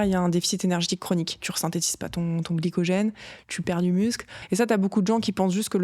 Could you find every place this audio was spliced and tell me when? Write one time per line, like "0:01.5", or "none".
0:01.5
0:04.3

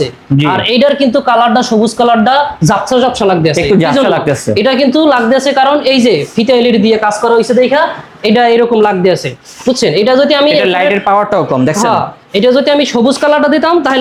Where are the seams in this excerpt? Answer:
none

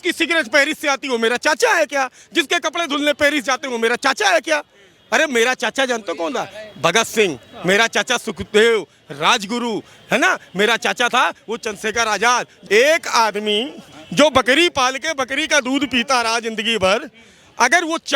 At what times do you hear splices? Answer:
0:12.5

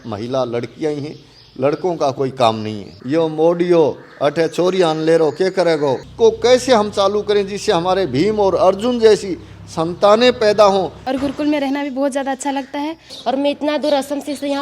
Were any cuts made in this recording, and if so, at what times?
0:03.0
0:06.0
0:11.0
0:13.1

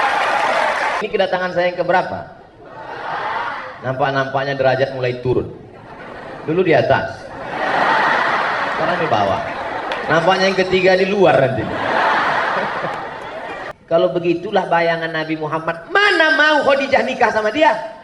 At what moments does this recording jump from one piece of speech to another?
0:01.0
0:13.7

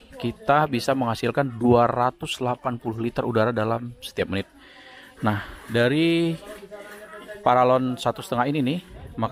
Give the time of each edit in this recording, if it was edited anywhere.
none

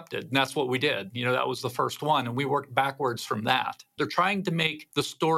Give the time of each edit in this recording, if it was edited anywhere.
0:03.9

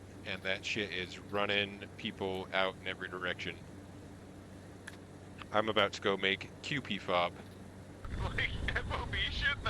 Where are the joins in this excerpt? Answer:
0:08.0

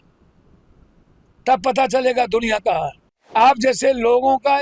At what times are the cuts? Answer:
0:03.3

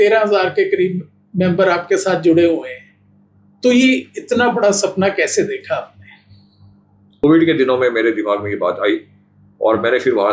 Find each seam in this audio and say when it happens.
0:07.2

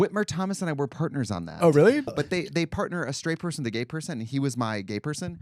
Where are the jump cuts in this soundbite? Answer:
0:02.1

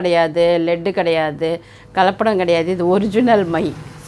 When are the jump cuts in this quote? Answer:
none

